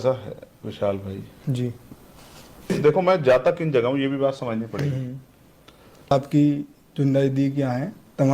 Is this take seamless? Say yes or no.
no